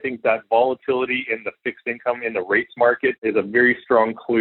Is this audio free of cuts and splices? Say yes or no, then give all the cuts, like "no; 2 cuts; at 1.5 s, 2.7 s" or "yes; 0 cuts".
no; 1 cut; at 3.2 s